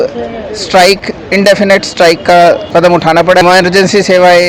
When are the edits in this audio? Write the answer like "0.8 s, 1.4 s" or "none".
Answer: 3.4 s